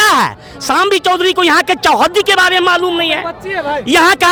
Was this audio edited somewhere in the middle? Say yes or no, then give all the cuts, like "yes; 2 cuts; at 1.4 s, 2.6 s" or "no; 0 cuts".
no; 0 cuts